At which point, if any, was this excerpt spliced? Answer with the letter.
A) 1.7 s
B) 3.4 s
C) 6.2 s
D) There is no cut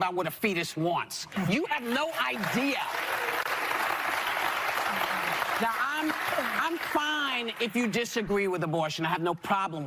B